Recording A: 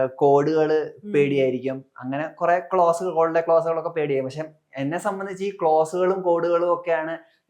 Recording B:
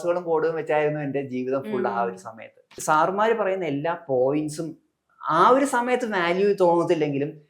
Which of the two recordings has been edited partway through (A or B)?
B